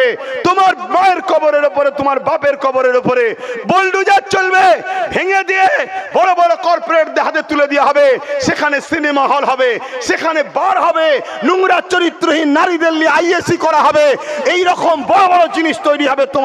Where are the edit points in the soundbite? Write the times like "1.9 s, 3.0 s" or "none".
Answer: none